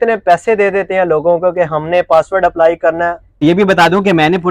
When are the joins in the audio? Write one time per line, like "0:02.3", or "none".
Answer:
0:03.3